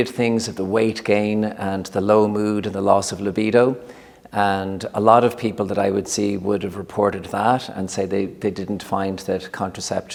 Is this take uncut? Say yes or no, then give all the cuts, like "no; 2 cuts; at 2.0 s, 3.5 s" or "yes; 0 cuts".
yes; 0 cuts